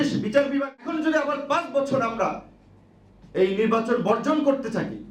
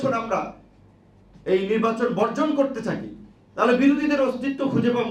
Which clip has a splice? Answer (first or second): first